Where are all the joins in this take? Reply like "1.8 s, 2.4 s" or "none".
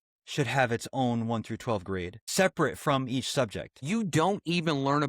2.2 s, 3.8 s

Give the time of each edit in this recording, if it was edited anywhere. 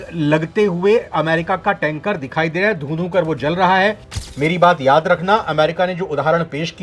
4.2 s

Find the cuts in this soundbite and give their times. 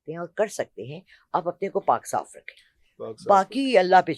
none

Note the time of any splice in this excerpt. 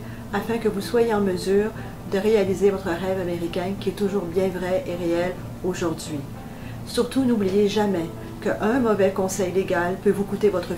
none

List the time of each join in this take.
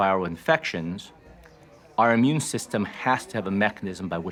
none

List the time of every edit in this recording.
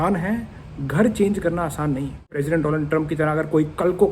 2.3 s

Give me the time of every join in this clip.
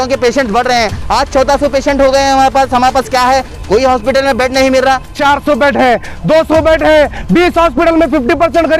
5.1 s

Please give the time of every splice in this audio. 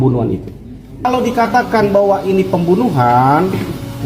1.0 s

